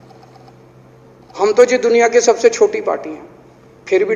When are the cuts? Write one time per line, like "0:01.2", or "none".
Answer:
none